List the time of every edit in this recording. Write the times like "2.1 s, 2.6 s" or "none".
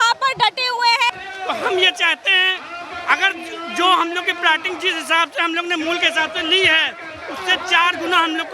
1.1 s